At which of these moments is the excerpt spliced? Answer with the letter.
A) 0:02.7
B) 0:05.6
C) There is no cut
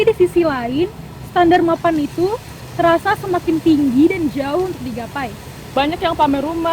B